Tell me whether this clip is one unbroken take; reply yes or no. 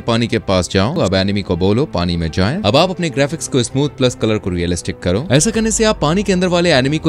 no